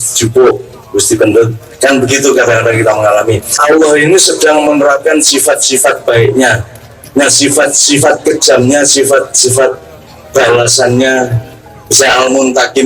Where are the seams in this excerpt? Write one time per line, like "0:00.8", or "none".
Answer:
0:03.7